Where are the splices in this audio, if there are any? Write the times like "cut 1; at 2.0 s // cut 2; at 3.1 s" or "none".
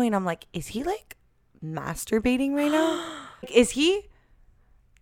cut 1; at 3.5 s

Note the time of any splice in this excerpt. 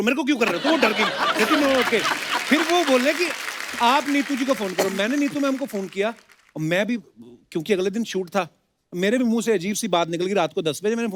none

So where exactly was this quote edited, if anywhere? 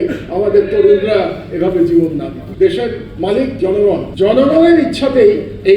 cut 1; at 2.4 s // cut 2; at 4.1 s

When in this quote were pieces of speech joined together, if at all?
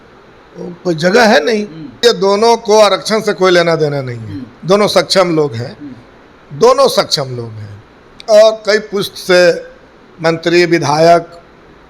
cut 1; at 2.0 s

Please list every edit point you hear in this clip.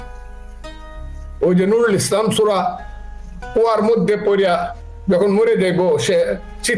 none

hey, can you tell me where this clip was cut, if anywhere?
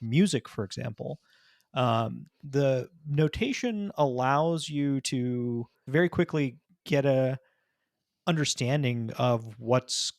cut 1; at 5.9 s

